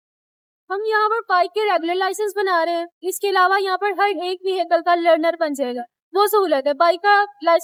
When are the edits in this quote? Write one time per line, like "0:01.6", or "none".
none